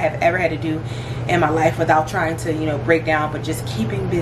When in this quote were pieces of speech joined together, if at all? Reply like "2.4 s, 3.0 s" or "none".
none

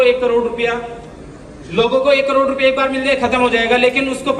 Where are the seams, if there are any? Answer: none

